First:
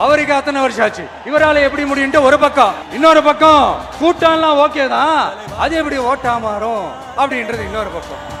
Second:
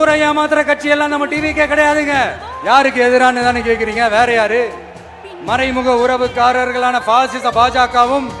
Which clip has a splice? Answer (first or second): second